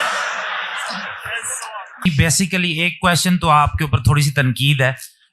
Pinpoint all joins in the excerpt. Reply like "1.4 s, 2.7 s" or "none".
2.0 s